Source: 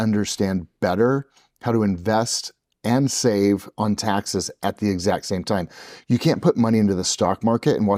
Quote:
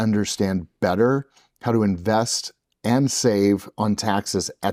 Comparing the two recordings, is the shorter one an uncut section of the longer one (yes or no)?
yes